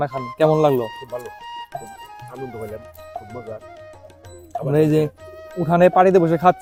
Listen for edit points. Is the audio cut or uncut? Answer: uncut